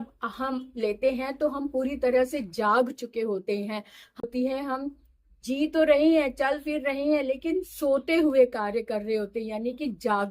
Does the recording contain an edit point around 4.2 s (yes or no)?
yes